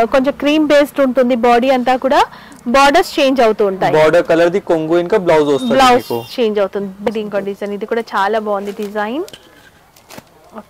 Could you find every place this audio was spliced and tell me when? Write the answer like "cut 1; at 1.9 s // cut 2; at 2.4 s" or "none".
cut 1; at 7.1 s